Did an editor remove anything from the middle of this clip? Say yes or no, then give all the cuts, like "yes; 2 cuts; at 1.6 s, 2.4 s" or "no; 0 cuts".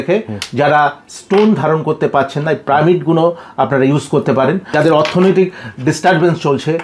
yes; 1 cut; at 4.7 s